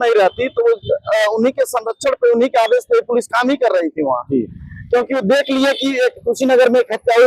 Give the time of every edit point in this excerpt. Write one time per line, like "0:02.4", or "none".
none

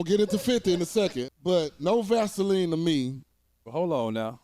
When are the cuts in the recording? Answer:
0:01.2

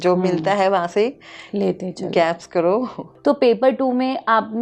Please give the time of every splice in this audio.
0:03.0

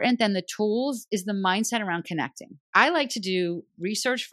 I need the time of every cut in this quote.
0:02.6

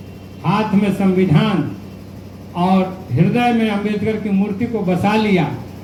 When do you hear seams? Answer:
none

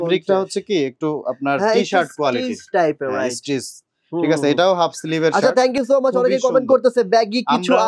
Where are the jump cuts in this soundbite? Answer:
none

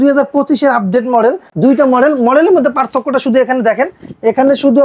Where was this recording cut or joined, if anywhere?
0:01.5

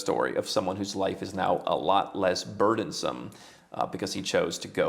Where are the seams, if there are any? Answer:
none

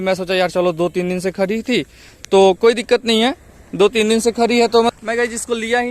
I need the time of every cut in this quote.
0:04.9

